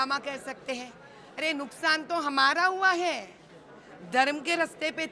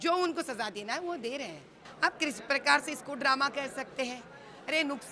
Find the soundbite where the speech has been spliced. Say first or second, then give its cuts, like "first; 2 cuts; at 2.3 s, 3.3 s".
second; 1 cut; at 1.8 s